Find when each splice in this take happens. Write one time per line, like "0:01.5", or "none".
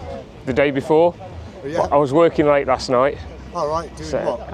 none

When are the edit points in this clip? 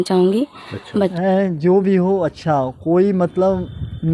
0:01.1

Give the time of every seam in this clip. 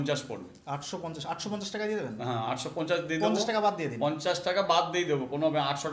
none

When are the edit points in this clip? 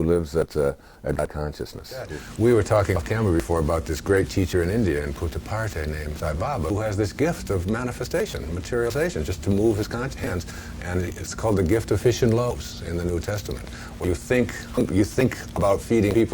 0:02.1

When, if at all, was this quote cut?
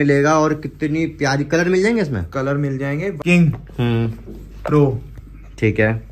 0:03.2

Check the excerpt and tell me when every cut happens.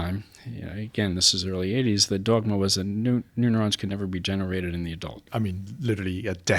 0:05.2

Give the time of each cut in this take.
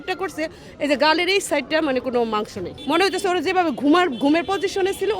0:02.7

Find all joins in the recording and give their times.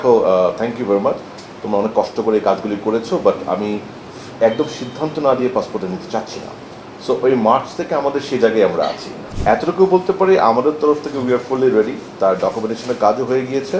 0:09.2

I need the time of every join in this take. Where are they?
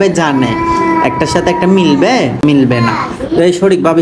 0:02.4

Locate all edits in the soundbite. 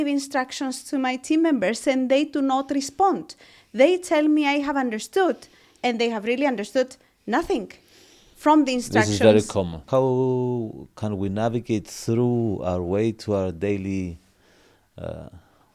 0:09.8

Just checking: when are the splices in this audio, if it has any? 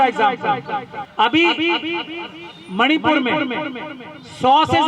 0:01.0

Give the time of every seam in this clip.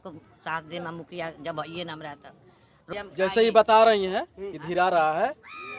0:02.9

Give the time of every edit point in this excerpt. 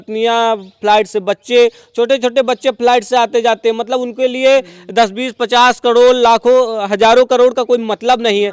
none

